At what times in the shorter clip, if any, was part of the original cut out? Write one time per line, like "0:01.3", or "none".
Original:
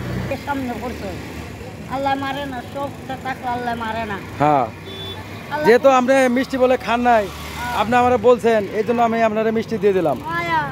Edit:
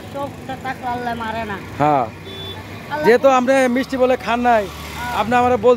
none

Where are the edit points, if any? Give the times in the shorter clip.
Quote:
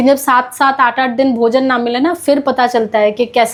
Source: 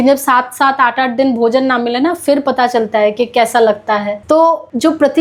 none

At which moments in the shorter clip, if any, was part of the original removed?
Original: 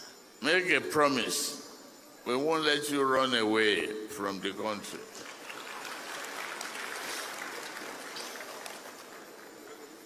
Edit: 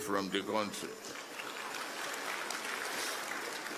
none

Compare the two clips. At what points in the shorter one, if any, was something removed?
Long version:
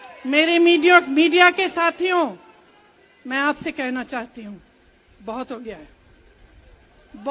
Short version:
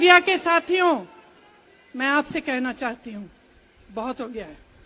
none

